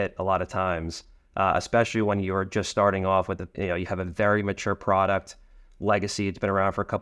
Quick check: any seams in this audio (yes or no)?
no